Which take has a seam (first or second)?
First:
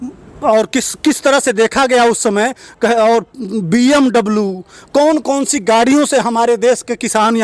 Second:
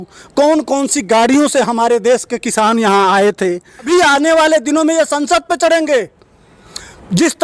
second